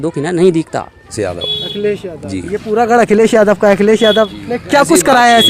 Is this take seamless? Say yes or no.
no